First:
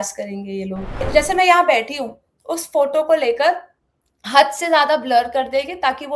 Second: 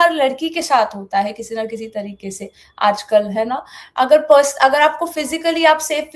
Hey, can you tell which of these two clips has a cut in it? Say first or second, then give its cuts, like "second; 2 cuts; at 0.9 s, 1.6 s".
first; 1 cut; at 1.1 s